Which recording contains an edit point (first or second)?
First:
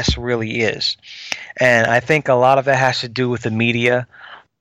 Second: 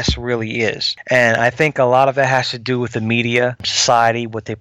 second